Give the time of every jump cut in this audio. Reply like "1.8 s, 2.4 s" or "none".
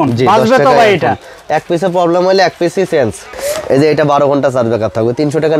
3.3 s